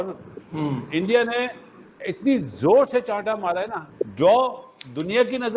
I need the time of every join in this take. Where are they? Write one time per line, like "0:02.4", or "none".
0:03.8